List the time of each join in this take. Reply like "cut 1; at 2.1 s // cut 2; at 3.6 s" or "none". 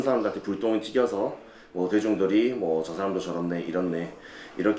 none